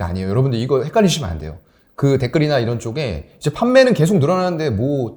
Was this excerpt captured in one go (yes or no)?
yes